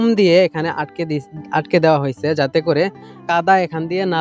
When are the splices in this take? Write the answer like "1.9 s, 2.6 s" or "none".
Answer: 3.2 s